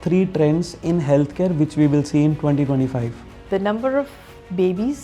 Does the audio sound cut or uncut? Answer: cut